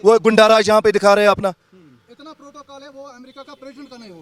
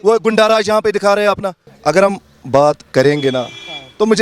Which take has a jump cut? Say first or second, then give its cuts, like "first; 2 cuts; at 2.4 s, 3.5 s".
second; 1 cut; at 1.6 s